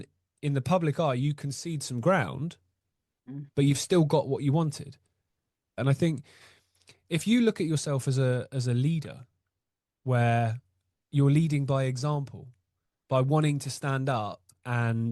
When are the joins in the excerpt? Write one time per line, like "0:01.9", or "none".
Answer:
0:05.8